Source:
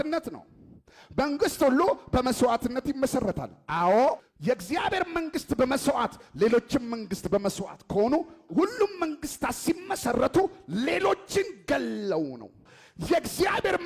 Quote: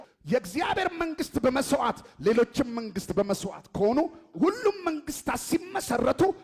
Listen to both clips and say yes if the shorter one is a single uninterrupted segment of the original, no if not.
yes